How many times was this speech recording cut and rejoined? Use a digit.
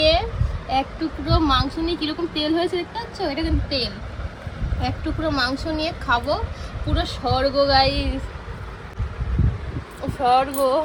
0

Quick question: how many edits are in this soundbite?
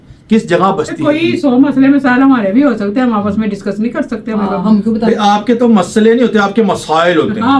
0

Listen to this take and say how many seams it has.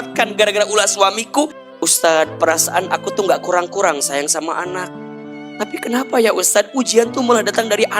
2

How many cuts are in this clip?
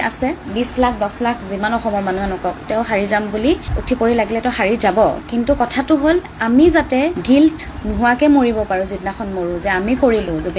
0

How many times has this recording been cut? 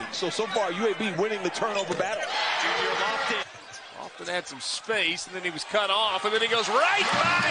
1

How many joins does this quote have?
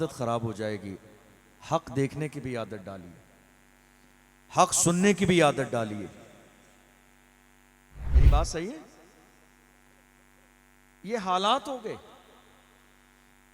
1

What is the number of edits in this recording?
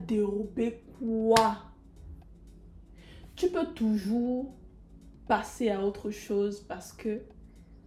0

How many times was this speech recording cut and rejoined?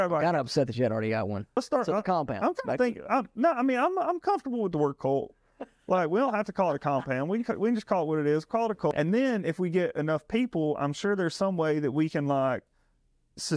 2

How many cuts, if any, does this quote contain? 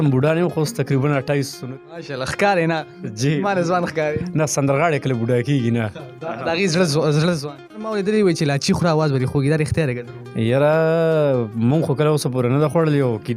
2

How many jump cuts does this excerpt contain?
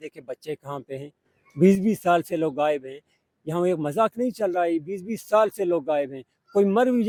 0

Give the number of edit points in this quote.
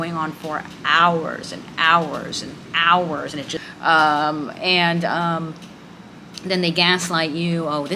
1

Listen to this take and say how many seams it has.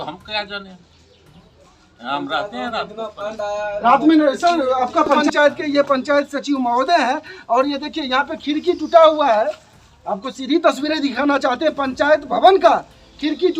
1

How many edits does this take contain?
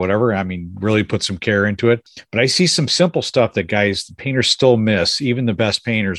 0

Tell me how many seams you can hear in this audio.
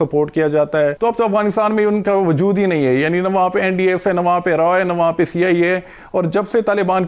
1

